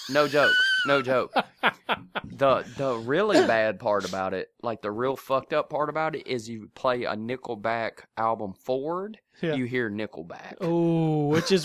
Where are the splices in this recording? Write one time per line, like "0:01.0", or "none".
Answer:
none

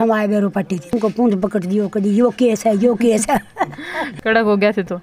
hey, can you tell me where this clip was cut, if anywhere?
0:00.9
0:04.0

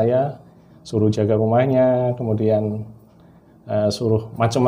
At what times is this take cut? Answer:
none

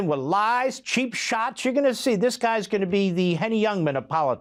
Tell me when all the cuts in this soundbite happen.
none

